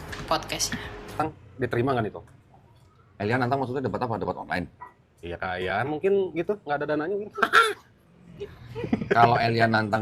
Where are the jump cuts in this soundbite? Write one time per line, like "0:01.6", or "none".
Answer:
0:01.2

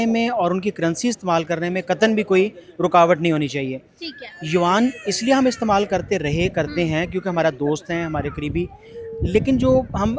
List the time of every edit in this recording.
none

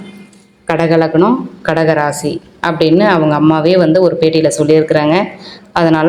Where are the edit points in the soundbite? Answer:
none

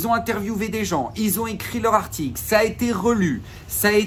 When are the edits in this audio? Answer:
none

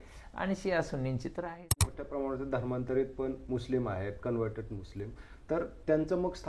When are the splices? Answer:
0:02.0

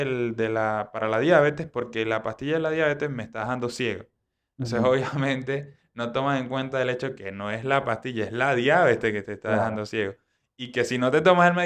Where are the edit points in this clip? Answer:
none

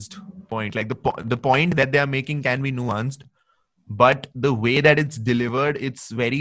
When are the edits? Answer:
0:01.7

